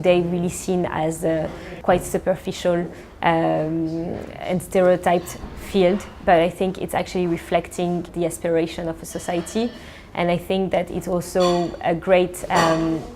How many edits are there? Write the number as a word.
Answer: two